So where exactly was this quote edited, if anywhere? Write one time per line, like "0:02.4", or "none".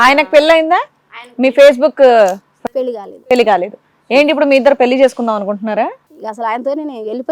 none